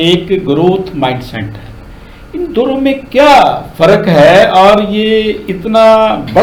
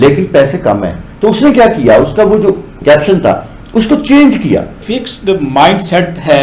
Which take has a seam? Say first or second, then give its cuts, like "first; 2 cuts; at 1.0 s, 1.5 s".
second; 2 cuts; at 2.7 s, 4.8 s